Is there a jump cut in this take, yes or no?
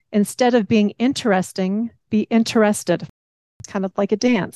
yes